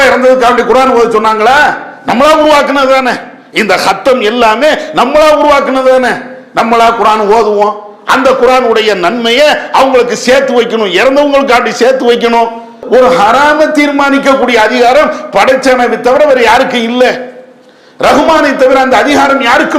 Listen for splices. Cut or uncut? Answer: uncut